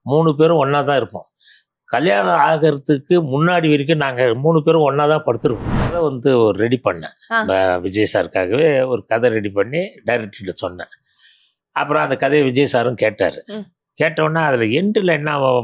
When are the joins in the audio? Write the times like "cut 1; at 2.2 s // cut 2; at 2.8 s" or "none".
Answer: cut 1; at 5.9 s